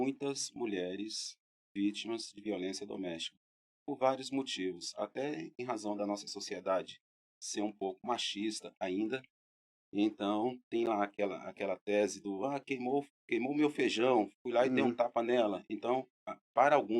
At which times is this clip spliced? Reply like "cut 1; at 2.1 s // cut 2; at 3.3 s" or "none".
none